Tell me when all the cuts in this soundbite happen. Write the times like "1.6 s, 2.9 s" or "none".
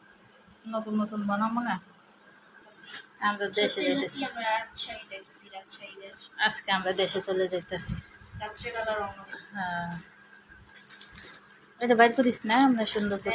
2.5 s